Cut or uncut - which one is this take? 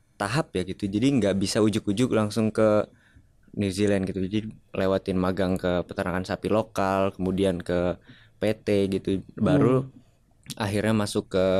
uncut